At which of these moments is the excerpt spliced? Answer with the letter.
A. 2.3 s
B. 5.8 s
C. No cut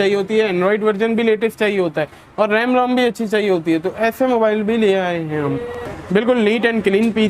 B